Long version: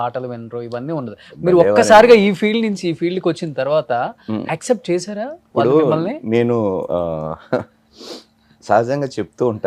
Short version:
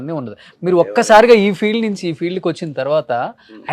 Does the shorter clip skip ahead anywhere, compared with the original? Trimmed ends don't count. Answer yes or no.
no